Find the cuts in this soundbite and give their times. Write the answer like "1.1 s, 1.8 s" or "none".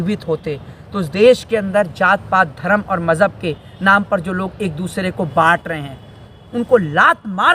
none